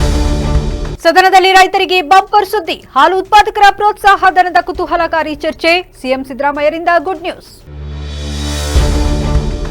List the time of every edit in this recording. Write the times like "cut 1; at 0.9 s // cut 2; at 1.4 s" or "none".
cut 1; at 0.9 s